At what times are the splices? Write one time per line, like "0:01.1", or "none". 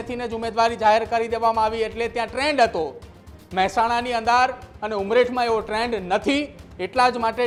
none